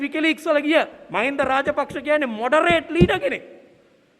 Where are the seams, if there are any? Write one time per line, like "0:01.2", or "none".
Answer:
0:01.0